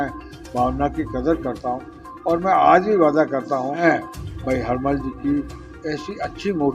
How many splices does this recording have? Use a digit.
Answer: 1